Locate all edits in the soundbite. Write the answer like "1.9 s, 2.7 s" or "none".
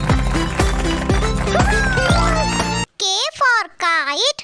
2.9 s